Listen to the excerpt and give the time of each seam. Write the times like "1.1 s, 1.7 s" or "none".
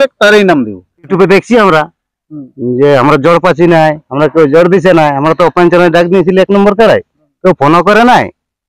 1.1 s